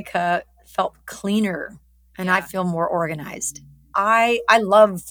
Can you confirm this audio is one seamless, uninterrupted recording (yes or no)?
yes